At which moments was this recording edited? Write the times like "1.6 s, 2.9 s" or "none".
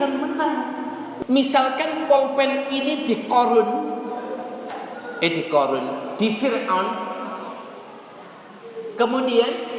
1.1 s